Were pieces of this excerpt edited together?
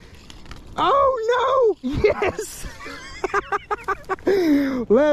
no; 0 cuts

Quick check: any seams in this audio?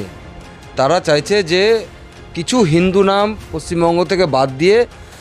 no; 0 cuts

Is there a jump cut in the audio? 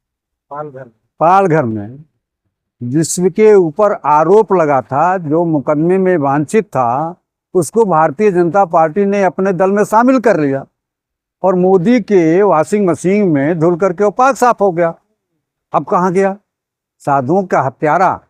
no; 0 cuts

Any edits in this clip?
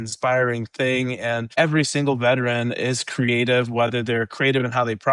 yes; 1 cut; at 1.5 s

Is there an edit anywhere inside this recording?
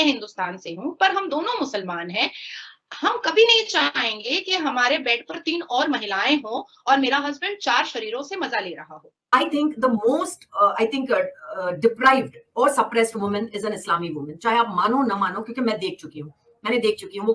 yes; 1 cut; at 9.6 s

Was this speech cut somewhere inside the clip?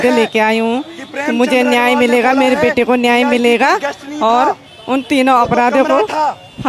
no; 0 cuts

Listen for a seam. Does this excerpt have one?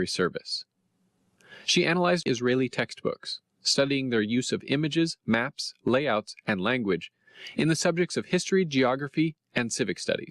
yes; 1 cut; at 7.9 s

